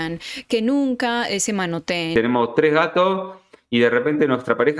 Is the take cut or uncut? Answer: cut